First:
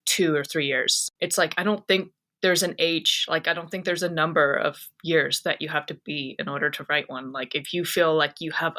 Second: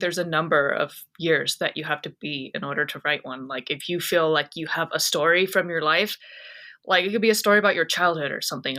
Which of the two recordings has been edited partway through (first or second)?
first